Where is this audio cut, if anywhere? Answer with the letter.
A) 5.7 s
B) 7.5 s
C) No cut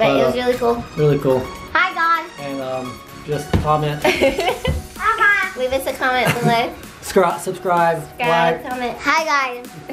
C